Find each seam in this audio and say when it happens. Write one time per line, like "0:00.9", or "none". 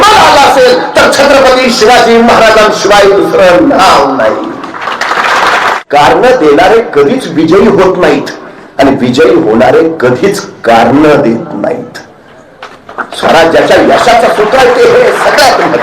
0:05.8